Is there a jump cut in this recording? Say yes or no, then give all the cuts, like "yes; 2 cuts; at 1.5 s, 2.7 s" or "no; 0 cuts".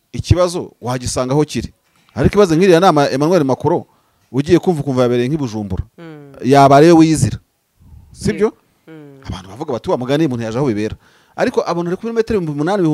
no; 0 cuts